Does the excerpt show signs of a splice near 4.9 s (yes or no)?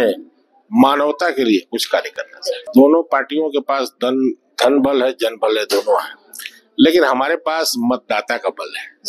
no